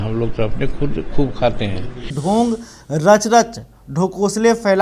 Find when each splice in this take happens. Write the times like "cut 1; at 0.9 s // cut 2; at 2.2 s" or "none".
cut 1; at 2.1 s